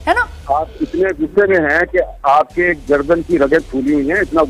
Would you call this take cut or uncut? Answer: uncut